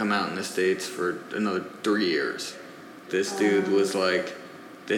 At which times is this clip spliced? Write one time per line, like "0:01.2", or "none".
0:02.9